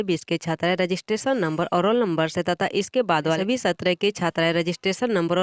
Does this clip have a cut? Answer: yes; 1 cut; at 3.4 s

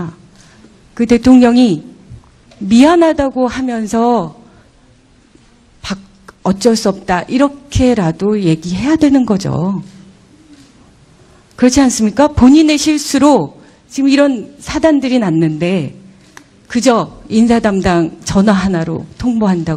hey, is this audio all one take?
yes; 0 cuts

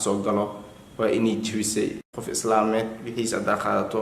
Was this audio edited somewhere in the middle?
yes; 1 cut; at 2.0 s

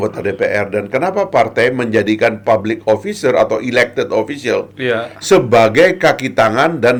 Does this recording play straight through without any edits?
yes; 0 cuts

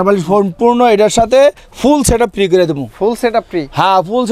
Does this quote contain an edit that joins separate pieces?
no; 0 cuts

